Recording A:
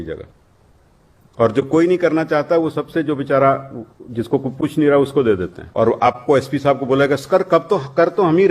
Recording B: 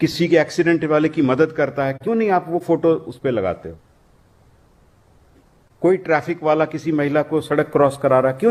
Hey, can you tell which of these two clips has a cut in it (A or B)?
A